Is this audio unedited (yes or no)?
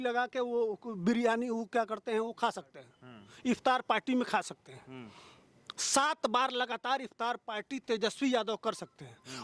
yes